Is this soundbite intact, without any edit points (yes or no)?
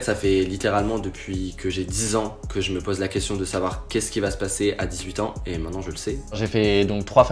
no